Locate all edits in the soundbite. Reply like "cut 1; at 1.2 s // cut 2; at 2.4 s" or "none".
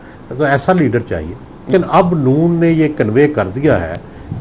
cut 1; at 1.7 s